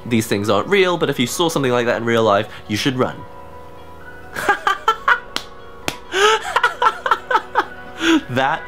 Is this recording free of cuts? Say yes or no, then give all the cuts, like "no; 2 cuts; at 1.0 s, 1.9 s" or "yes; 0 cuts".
yes; 0 cuts